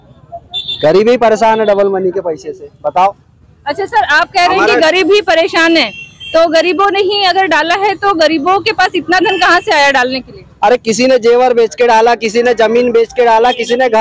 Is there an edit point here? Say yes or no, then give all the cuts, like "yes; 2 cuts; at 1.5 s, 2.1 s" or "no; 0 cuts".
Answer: no; 0 cuts